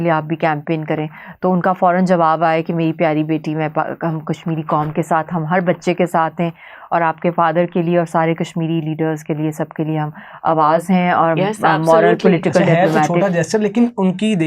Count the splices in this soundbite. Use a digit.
0